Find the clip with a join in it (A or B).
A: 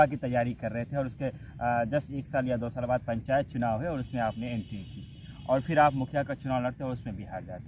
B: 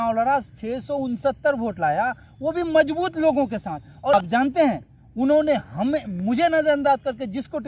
B